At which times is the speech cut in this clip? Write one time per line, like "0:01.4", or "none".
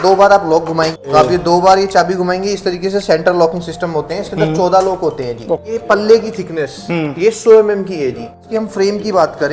0:01.1
0:05.7
0:08.4